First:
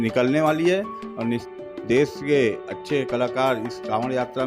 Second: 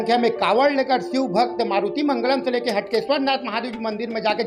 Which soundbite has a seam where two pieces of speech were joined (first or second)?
first